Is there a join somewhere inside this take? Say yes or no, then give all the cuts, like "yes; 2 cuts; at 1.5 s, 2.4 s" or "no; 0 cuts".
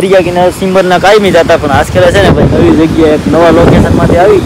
no; 0 cuts